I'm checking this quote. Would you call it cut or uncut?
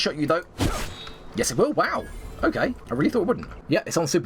uncut